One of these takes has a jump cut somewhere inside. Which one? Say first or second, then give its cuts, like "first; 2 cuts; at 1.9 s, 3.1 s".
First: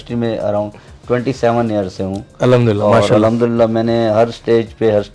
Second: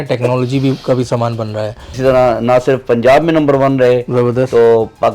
second; 1 cut; at 2.0 s